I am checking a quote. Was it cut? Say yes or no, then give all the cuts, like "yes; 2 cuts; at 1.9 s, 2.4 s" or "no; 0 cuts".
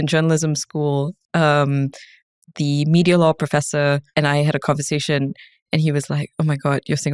yes; 1 cut; at 4.1 s